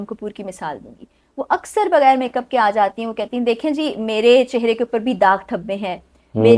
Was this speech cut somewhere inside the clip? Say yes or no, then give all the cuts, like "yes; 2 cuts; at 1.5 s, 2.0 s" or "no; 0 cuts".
no; 0 cuts